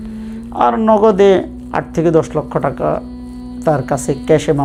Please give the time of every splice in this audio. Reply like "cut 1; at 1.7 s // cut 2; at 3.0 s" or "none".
none

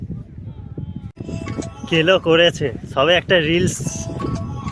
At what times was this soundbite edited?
cut 1; at 1.3 s

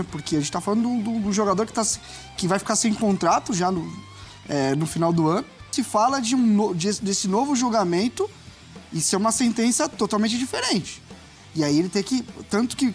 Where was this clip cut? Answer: cut 1; at 5.7 s

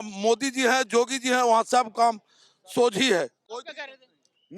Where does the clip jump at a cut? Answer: none

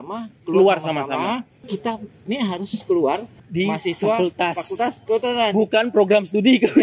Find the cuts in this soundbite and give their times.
cut 1; at 1.6 s // cut 2; at 3.4 s

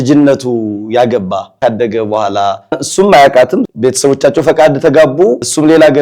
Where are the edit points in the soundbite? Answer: cut 1; at 1.6 s

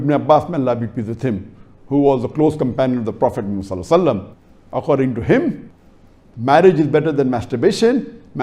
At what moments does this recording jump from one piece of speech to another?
none

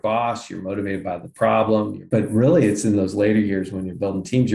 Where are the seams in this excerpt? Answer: cut 1; at 2.0 s

